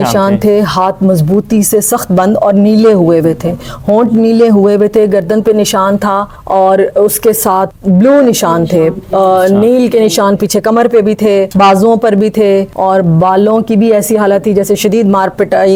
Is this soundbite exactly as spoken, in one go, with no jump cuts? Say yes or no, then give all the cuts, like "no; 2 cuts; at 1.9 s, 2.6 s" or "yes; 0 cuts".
yes; 0 cuts